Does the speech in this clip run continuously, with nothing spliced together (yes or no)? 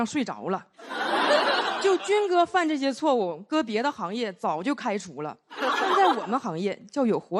yes